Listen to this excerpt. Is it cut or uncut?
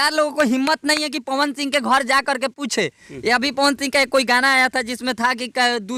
uncut